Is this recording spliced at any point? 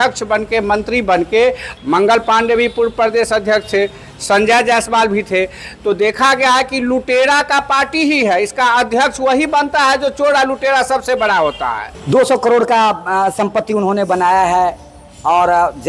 yes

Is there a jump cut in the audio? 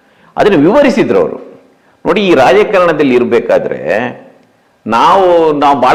no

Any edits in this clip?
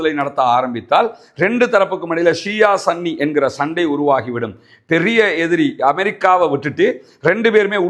no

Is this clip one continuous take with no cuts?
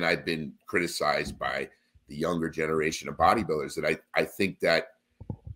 yes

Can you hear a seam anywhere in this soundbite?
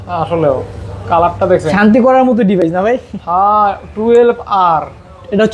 no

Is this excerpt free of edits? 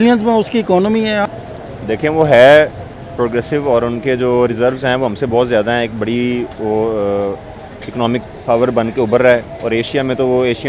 no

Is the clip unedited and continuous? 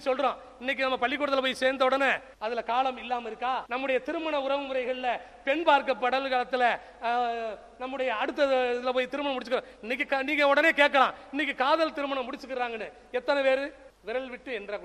no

